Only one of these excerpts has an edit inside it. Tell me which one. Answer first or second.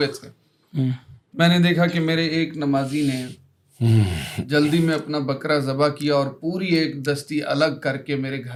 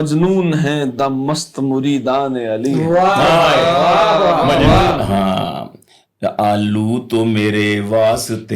second